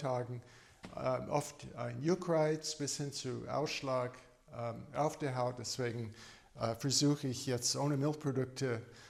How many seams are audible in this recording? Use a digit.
0